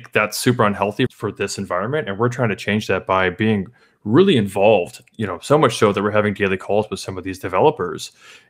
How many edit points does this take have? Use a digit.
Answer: 1